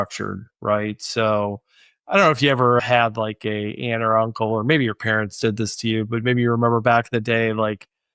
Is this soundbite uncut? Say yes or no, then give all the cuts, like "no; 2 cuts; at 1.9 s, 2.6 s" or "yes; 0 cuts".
yes; 0 cuts